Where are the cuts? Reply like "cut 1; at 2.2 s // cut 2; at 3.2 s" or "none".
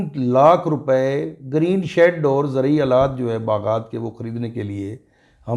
none